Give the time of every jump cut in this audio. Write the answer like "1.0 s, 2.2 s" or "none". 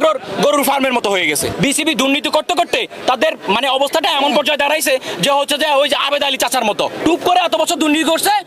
1.5 s, 7.0 s